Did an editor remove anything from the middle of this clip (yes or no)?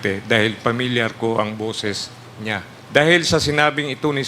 yes